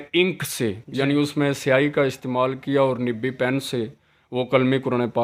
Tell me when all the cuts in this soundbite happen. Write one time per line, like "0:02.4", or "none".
none